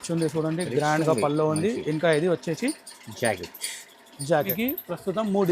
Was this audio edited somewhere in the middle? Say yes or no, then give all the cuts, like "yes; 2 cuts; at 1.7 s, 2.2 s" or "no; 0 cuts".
yes; 1 cut; at 4.5 s